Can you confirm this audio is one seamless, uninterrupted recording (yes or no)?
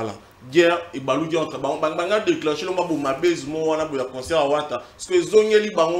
yes